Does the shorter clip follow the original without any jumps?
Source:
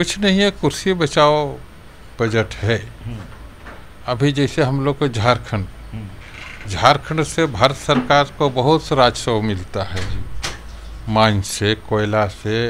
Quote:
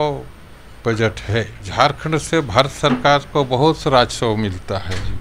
no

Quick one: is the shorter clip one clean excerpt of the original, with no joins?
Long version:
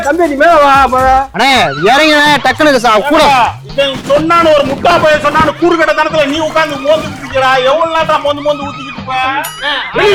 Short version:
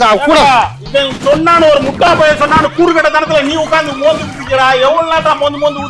yes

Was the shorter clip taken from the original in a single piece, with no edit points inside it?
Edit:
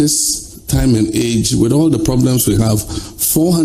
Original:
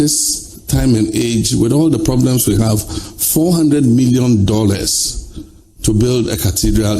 yes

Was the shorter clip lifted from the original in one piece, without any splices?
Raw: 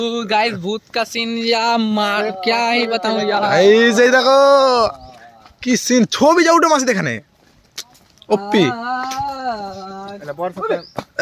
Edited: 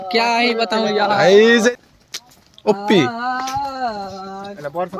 no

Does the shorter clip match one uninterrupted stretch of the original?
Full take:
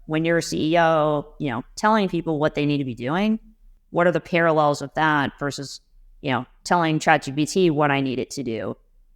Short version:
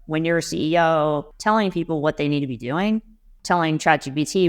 no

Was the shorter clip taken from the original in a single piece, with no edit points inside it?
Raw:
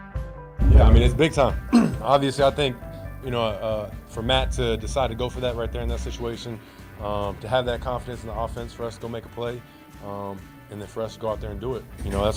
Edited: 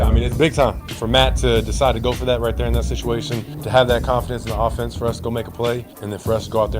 no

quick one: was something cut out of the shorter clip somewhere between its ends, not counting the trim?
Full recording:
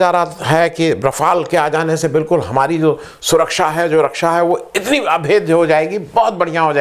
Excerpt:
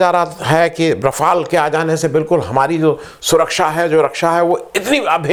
no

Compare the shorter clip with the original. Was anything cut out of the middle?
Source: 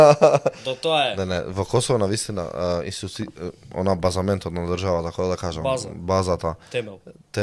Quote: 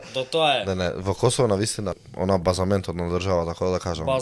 yes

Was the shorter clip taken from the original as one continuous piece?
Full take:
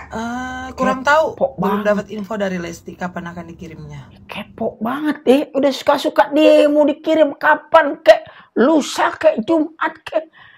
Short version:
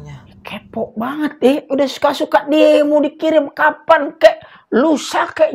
yes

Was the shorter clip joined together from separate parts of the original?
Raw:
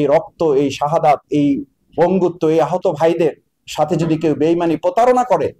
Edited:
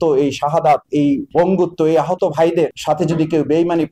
yes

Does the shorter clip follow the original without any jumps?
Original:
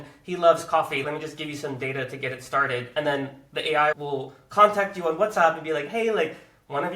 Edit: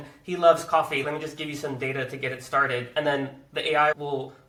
yes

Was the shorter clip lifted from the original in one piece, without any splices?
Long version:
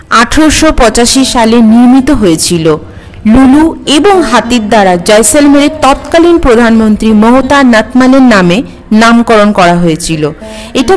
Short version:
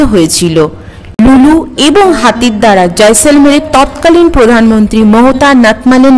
yes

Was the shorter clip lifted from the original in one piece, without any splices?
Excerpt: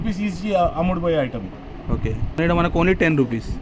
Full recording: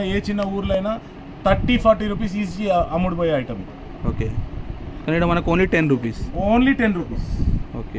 no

